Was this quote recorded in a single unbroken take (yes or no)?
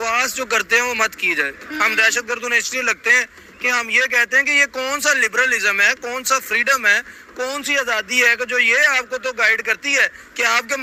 yes